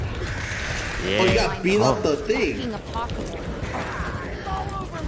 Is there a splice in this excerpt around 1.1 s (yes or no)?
yes